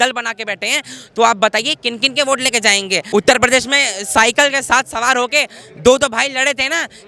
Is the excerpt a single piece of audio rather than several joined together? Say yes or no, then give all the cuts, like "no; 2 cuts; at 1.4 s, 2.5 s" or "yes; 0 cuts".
no; 1 cut; at 3.0 s